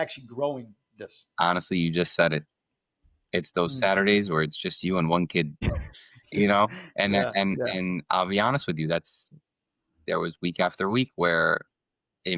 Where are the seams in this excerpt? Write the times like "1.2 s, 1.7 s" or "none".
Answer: 5.7 s